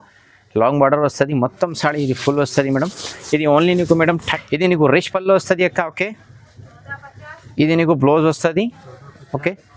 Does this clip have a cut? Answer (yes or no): yes